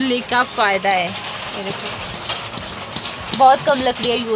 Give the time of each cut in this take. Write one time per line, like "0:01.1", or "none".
none